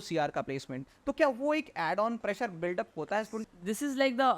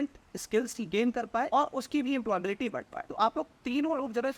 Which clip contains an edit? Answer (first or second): first